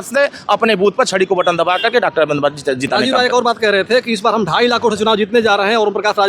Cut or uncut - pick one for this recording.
uncut